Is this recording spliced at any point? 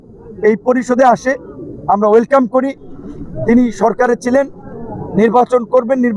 no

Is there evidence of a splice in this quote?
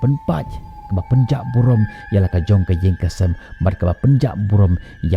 no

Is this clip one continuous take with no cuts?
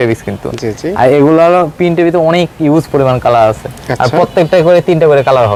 yes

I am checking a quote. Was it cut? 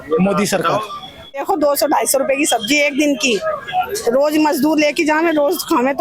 yes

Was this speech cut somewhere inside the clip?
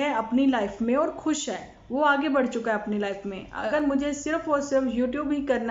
yes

